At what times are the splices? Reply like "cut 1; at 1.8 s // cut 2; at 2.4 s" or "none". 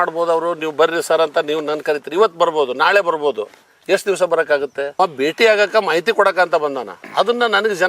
cut 1; at 5.0 s